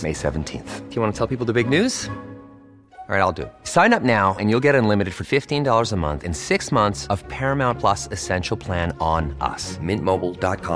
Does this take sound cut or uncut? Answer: uncut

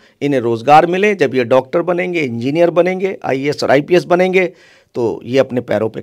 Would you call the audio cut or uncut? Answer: uncut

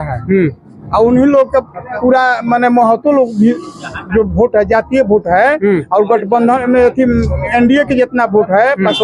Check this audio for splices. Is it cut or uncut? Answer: uncut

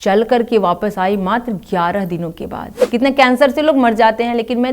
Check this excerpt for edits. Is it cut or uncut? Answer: cut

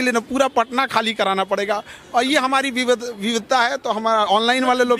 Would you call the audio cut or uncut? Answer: uncut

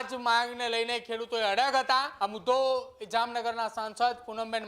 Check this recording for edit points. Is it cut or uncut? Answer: cut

